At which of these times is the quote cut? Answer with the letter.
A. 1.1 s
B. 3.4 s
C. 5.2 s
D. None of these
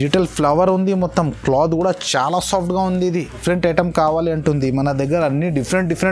B